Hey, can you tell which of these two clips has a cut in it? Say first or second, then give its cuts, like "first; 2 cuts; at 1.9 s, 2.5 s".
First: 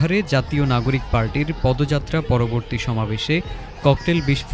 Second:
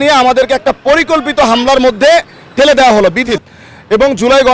second; 1 cut; at 3.3 s